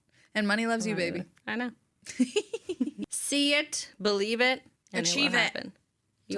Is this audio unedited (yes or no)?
no